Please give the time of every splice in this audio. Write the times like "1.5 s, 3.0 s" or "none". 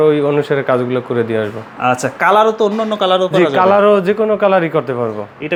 none